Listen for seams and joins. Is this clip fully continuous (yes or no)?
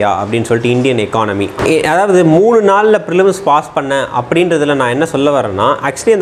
no